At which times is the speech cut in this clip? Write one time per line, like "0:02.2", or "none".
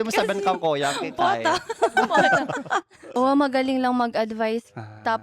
0:03.0